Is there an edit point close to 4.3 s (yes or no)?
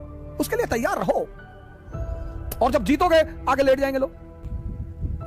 yes